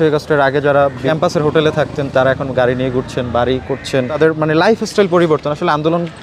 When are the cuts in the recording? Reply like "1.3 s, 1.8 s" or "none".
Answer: none